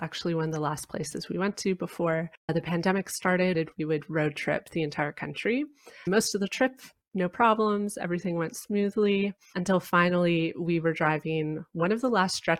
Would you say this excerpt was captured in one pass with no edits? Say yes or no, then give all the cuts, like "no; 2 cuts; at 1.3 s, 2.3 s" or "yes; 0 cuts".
no; 2 cuts; at 3.5 s, 6.0 s